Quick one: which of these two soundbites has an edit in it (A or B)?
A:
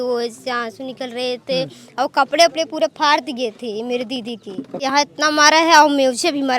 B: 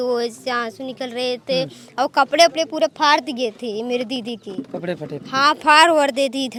A